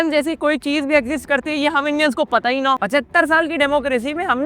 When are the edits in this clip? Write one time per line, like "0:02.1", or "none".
0:02.8